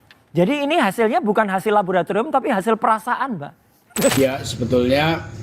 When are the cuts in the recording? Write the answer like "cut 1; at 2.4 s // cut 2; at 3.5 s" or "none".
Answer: cut 1; at 4.1 s